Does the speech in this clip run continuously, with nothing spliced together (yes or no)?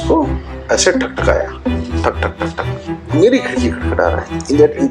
no